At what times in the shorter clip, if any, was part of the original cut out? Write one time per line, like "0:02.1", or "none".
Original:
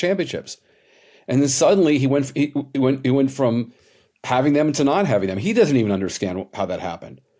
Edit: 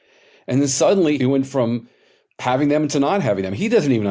0:01.2